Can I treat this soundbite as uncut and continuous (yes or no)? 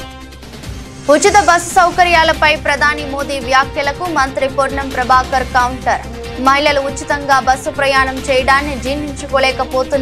yes